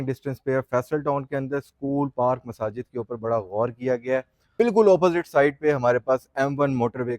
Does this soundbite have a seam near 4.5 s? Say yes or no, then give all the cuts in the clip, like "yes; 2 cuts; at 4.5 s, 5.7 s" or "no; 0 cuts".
yes; 1 cut; at 4.5 s